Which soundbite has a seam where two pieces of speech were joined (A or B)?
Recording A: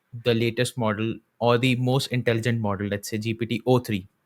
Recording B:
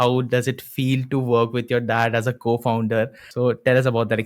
B